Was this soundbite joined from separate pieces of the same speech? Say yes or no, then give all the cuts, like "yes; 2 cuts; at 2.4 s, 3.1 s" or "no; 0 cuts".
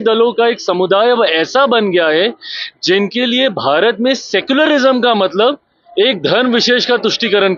no; 0 cuts